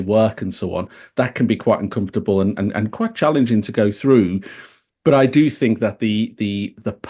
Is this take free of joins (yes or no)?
yes